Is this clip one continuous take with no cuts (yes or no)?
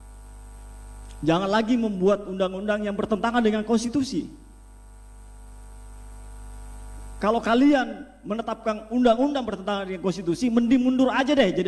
yes